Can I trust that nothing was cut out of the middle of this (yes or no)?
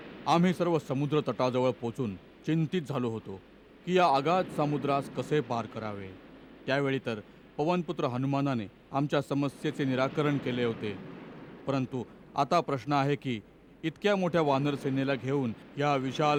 yes